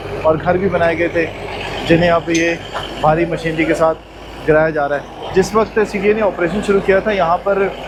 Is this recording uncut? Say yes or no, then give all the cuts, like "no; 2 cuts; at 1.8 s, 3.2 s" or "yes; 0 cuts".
yes; 0 cuts